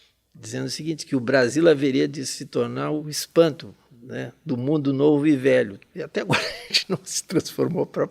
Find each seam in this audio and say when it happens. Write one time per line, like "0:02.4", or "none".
0:03.0
0:05.8